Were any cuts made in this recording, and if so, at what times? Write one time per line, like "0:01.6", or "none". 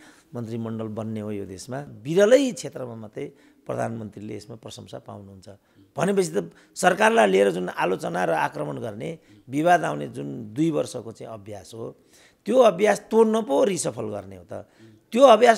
0:02.0